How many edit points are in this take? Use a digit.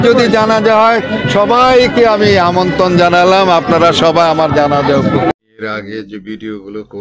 1